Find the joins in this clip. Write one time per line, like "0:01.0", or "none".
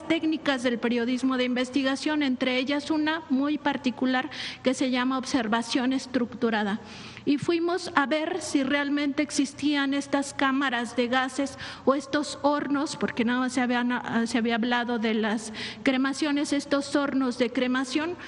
none